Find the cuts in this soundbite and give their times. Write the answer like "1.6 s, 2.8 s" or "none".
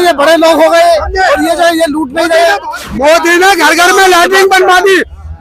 2.7 s